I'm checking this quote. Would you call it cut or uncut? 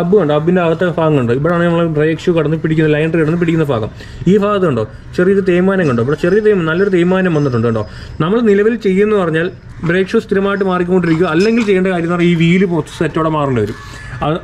uncut